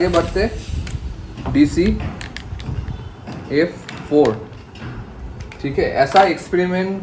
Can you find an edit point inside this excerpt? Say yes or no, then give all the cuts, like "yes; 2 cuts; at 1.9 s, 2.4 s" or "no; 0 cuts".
no; 0 cuts